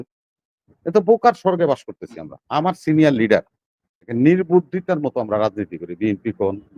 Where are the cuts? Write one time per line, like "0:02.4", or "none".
0:04.0